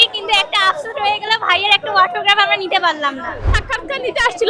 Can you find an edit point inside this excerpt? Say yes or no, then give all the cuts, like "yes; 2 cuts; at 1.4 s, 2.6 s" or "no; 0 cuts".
yes; 1 cut; at 3.6 s